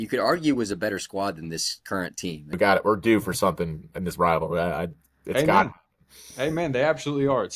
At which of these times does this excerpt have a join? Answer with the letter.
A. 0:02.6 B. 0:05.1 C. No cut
A